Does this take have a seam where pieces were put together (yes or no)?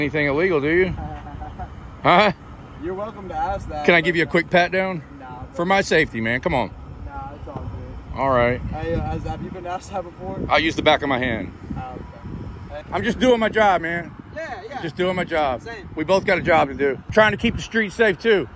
yes